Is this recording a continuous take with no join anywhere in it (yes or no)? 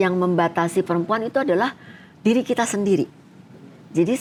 yes